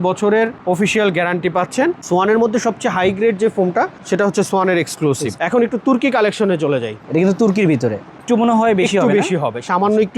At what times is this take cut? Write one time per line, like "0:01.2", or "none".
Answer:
0:02.0
0:05.4
0:08.2

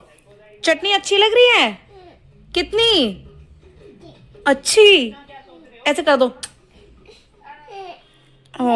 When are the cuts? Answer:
none

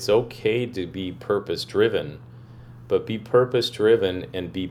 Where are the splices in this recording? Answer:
none

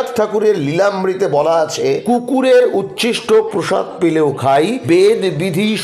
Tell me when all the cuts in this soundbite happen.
0:02.0
0:04.8

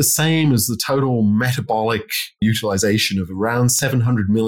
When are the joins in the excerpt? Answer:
0:02.4

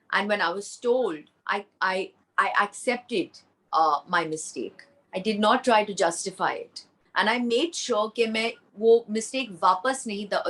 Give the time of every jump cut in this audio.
none

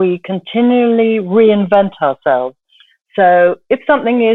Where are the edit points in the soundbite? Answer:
none

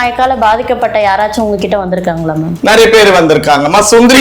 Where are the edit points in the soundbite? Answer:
none

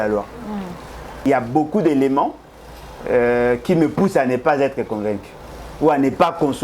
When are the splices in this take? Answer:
0:01.2

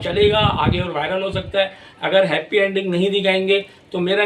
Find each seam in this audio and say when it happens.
none

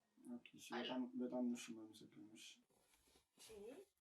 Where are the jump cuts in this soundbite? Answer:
0:02.7

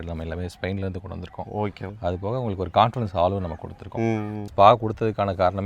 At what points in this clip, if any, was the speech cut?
0:01.9
0:04.4

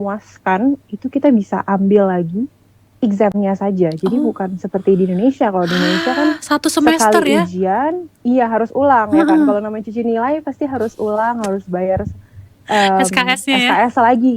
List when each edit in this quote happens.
none

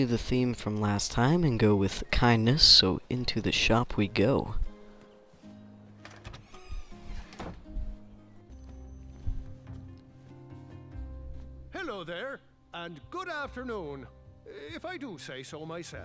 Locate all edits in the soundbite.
none

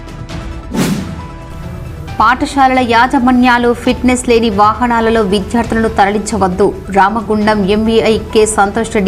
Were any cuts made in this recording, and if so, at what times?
0:01.3

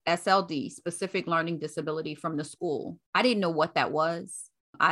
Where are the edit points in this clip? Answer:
0:03.0

